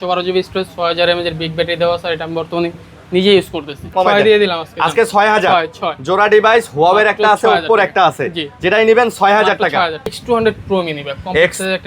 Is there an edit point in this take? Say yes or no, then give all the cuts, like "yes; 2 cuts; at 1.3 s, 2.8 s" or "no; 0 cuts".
yes; 2 cuts; at 3.9 s, 10.2 s